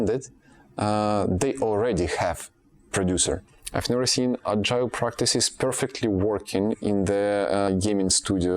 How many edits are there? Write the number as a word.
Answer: two